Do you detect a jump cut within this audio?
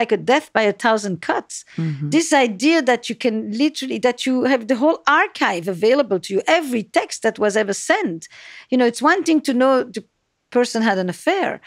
no; 0 cuts

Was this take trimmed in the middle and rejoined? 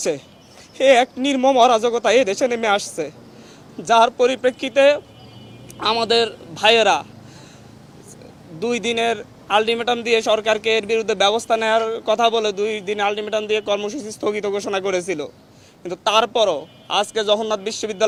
no; 0 cuts

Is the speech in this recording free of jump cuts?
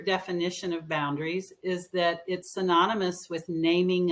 yes; 0 cuts

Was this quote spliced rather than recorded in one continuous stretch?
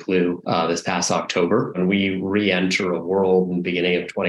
yes; 1 cut; at 1.8 s

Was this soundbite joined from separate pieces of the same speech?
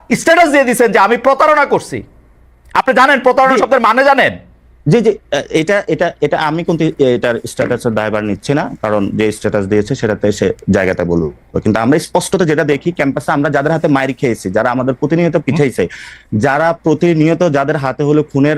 no; 0 cuts

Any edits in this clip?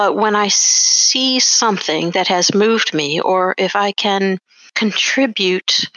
yes; 1 cut; at 4.6 s

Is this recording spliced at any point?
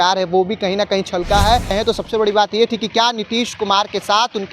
yes; 1 cut; at 1.7 s

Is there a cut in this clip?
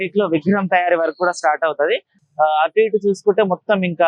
no; 0 cuts

